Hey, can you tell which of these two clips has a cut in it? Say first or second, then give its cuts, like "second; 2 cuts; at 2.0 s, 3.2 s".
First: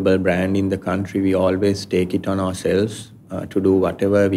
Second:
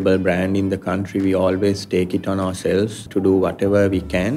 second; 1 cut; at 3.0 s